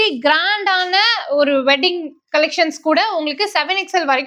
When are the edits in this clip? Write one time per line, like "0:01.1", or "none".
none